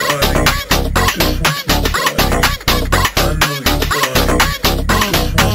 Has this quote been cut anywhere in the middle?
no; 0 cuts

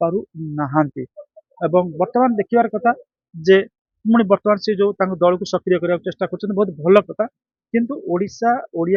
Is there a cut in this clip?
no; 0 cuts

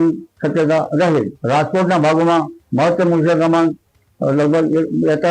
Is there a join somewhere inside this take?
yes; 1 cut; at 1.4 s

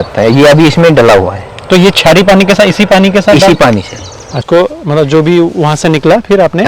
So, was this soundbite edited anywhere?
yes; 1 cut; at 4.4 s

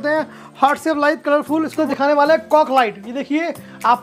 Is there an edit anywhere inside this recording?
yes; 1 cut; at 1.8 s

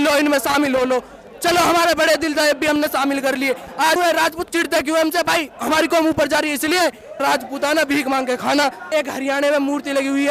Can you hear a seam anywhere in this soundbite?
yes; 3 cuts; at 4.0 s, 7.2 s, 8.9 s

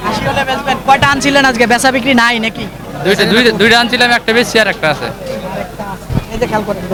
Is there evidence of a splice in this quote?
no; 0 cuts

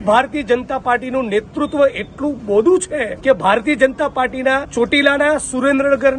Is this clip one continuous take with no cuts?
no; 2 cuts; at 3.1 s, 4.7 s

